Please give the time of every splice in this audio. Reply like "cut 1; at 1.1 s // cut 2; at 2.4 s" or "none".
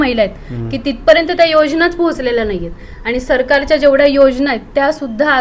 none